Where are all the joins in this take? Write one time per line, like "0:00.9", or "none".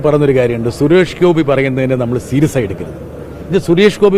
0:03.3